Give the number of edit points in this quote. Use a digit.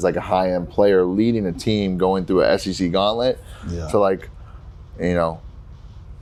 0